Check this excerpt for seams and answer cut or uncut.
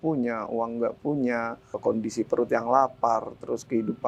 cut